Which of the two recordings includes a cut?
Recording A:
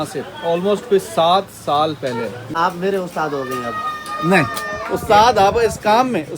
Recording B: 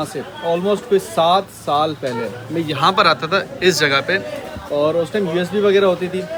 A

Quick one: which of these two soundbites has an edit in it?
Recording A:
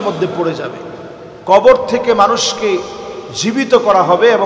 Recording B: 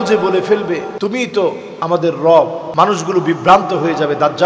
B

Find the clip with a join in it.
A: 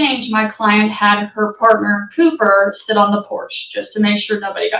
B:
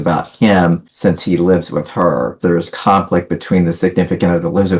B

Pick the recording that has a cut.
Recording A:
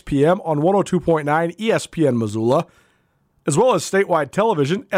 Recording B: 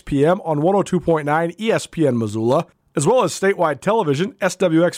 B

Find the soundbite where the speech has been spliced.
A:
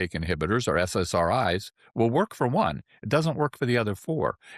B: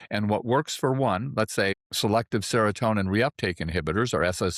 B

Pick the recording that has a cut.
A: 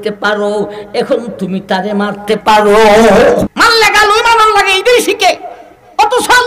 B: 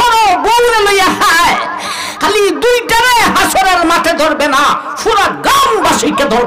A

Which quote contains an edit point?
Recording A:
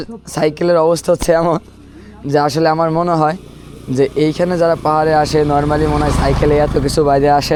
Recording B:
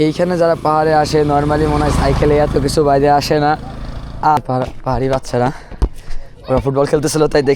B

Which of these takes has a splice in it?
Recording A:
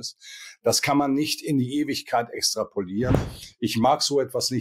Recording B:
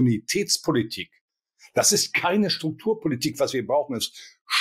A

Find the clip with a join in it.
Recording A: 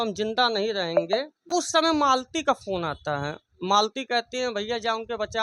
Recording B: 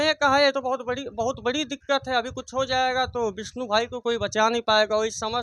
A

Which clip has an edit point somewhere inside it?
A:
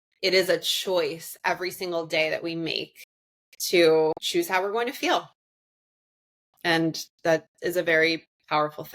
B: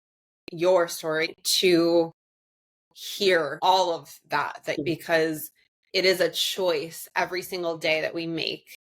B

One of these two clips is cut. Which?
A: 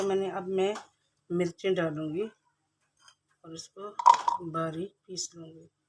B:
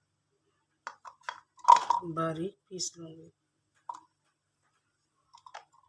B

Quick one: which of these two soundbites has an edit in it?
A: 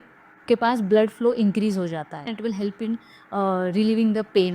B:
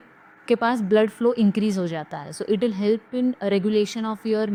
A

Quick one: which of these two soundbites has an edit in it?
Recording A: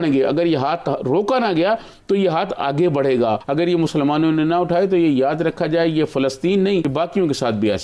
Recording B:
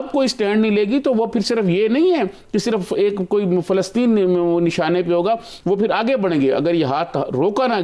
A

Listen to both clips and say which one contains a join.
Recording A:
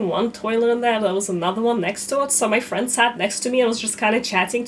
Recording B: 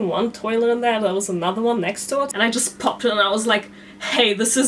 B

